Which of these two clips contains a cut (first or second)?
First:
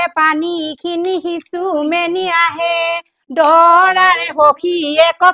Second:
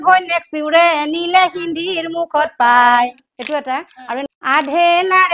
second